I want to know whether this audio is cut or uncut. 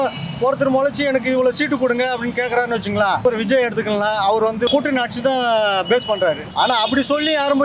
cut